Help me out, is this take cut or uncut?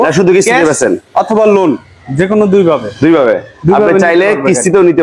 uncut